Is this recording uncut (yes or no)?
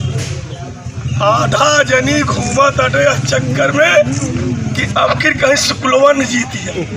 yes